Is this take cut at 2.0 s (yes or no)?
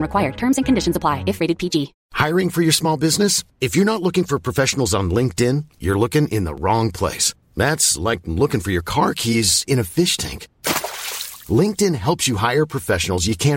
yes